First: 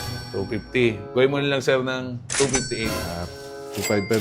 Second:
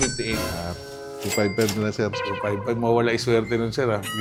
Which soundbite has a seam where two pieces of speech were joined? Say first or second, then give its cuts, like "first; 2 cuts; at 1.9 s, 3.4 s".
first; 1 cut; at 1.1 s